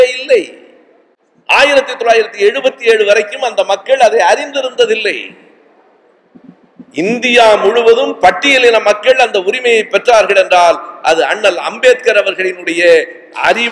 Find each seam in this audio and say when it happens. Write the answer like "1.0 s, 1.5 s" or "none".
none